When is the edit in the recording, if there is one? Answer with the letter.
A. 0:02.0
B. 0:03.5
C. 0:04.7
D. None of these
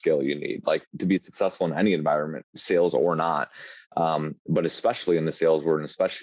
D